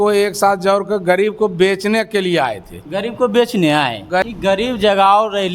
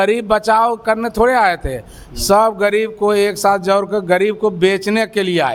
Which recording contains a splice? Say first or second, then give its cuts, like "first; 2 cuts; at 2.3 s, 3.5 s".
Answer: first; 1 cut; at 4.2 s